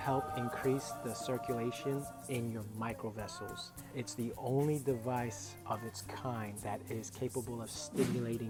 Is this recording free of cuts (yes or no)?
yes